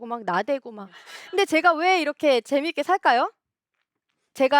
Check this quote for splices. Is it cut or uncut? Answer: cut